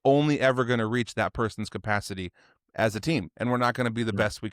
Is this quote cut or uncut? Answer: uncut